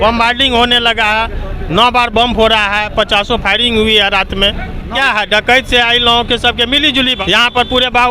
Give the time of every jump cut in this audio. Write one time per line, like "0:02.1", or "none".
0:04.9
0:07.2